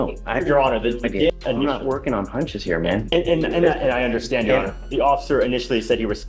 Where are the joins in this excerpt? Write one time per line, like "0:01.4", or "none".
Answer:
0:01.3

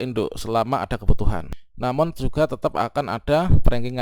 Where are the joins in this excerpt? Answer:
0:01.5

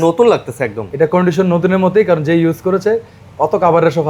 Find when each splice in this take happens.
none

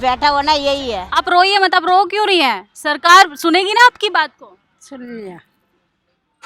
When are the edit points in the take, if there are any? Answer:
0:01.0

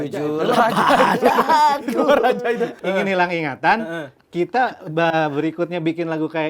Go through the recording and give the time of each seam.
0:02.8

